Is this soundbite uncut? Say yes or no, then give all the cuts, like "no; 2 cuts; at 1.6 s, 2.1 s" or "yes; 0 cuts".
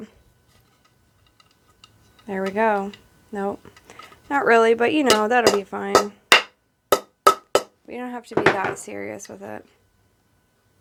yes; 0 cuts